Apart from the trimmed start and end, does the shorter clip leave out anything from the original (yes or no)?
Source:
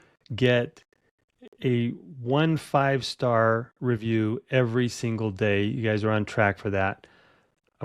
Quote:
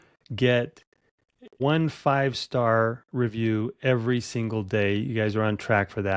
yes